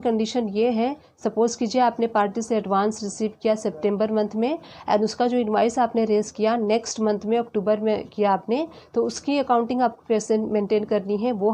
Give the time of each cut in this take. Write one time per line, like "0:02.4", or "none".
none